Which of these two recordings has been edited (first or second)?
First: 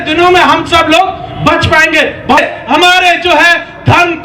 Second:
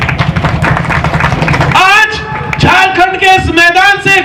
first